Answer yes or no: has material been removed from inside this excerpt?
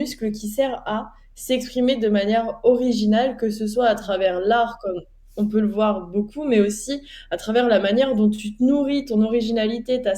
no